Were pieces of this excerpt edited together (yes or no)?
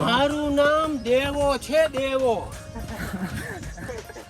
yes